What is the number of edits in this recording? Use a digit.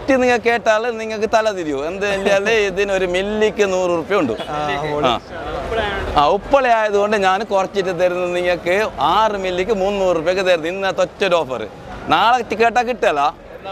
0